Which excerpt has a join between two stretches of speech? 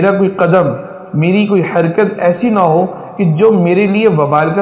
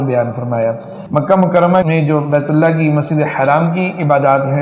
second; 2 cuts; at 0.9 s, 1.8 s

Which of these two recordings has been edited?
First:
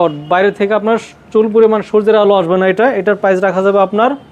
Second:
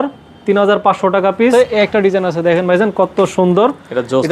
second; 1 cut; at 1.5 s

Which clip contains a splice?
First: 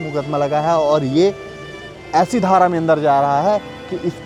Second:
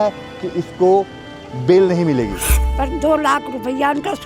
second; 1 cut; at 2.6 s

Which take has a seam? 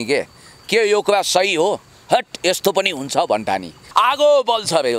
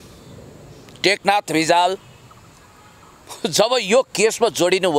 first; 1 cut; at 3.8 s

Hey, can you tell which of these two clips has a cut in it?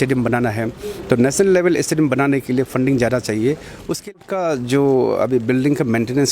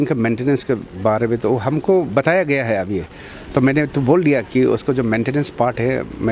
first; 1 cut; at 4.0 s

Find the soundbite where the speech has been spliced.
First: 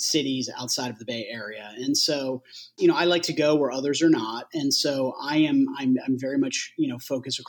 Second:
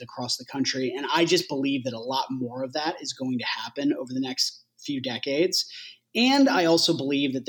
first; 1 cut; at 2.7 s

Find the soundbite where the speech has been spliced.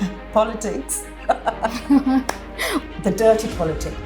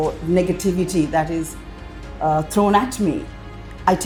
first; 1 cut; at 2.8 s

